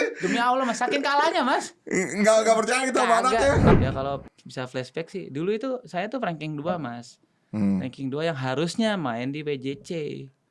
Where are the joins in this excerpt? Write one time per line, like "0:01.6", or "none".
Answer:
0:03.7